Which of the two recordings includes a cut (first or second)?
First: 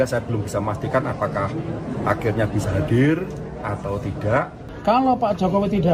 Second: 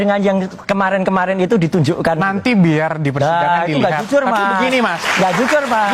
first